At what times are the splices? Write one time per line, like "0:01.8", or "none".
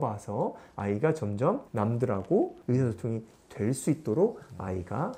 0:02.6